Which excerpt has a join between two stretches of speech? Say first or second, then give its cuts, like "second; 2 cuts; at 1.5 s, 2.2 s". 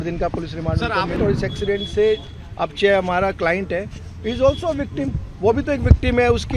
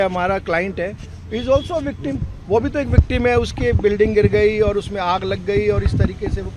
first; 1 cut; at 1.1 s